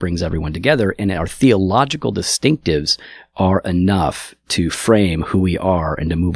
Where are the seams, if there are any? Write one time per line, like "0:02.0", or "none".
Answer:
none